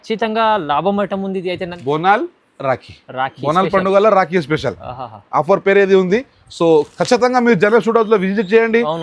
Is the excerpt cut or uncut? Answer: cut